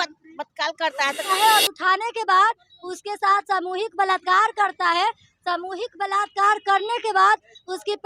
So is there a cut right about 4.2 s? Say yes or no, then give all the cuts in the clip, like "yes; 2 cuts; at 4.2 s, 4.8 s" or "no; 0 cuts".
no; 1 cut; at 1.2 s